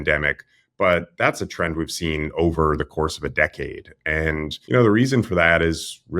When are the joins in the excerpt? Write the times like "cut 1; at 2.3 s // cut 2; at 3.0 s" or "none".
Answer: cut 1; at 4.6 s

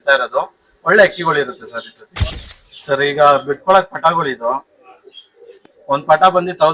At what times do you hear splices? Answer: cut 1; at 2.1 s

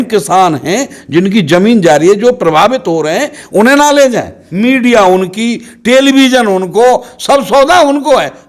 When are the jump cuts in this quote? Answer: cut 1; at 4.4 s

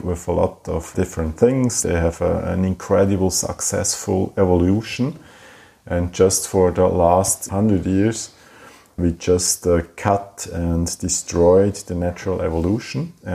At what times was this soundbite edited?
cut 1; at 1.8 s

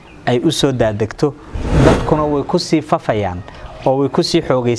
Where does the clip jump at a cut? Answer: cut 1; at 1.5 s

